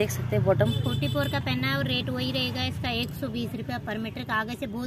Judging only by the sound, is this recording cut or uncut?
uncut